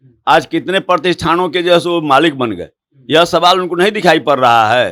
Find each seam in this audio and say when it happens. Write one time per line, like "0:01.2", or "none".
none